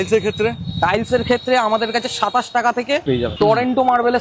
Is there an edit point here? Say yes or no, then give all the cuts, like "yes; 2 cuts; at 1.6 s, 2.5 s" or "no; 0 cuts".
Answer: yes; 1 cut; at 3.2 s